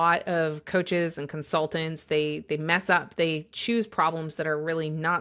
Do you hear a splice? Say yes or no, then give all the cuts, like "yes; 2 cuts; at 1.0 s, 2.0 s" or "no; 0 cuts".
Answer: no; 0 cuts